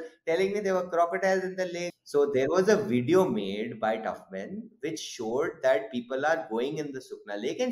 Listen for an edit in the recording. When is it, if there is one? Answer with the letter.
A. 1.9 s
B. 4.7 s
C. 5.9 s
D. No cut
A